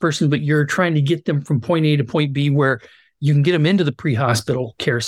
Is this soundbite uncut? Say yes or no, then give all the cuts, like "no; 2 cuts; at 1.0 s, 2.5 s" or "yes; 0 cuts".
yes; 0 cuts